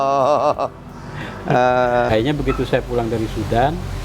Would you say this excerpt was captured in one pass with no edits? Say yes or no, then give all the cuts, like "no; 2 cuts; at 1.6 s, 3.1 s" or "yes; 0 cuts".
no; 1 cut; at 2.1 s